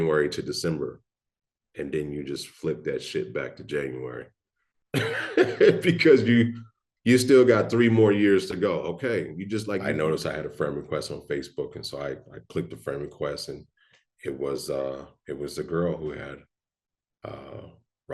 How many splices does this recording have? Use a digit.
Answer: 1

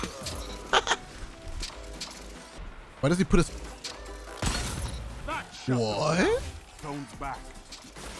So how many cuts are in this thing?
2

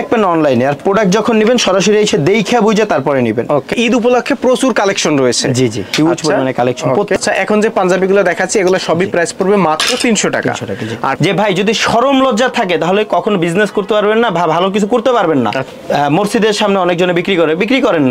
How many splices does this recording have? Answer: 4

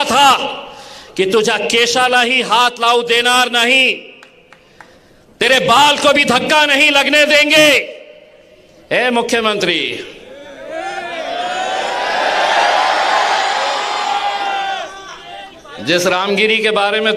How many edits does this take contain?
0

